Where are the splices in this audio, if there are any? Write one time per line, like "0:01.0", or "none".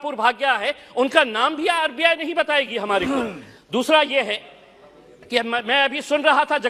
none